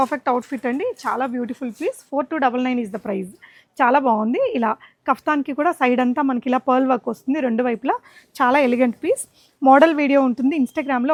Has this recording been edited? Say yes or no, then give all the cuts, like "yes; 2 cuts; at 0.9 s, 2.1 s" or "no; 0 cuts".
no; 0 cuts